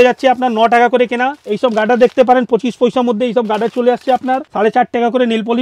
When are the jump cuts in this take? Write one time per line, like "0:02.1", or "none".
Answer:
0:01.4
0:04.5